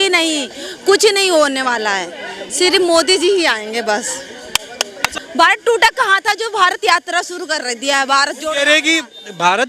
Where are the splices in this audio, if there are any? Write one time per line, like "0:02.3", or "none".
0:05.1